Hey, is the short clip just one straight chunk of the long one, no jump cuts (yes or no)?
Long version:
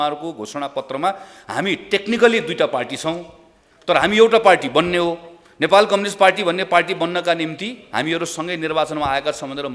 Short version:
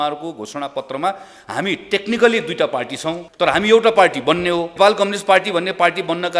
no